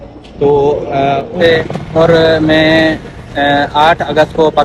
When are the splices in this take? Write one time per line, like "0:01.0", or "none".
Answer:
0:01.3